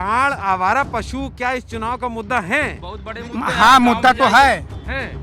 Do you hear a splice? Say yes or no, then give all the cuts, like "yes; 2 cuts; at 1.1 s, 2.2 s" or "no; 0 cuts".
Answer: no; 0 cuts